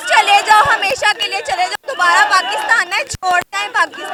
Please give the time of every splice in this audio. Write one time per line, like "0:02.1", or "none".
none